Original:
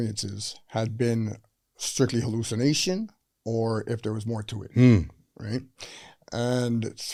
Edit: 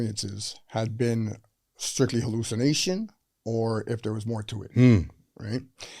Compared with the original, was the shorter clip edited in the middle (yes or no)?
no